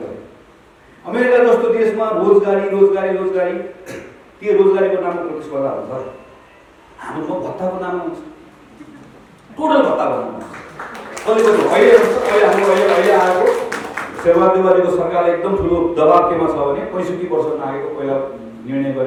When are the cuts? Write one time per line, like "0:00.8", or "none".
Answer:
none